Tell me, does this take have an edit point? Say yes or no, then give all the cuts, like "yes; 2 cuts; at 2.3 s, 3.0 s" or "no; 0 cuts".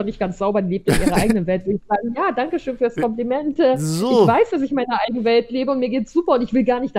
no; 0 cuts